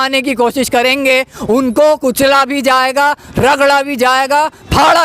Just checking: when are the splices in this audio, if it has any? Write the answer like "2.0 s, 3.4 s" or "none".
none